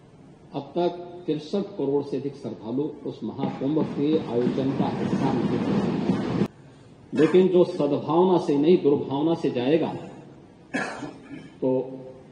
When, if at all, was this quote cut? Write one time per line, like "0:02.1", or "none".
0:06.5